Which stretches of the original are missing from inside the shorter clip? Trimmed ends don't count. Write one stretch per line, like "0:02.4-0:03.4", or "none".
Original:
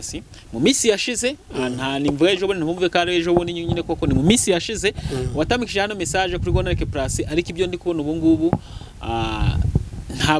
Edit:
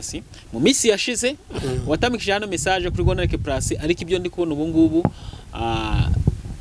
0:01.5-0:05.0